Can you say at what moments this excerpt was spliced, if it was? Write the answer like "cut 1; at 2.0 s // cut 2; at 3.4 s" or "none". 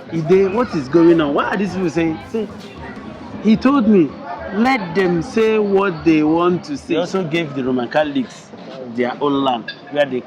cut 1; at 6.8 s